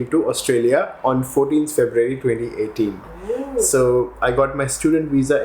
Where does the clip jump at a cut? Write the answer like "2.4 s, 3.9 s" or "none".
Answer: none